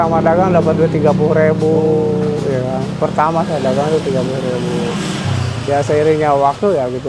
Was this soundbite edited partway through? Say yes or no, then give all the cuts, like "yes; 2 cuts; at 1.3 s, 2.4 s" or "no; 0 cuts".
no; 0 cuts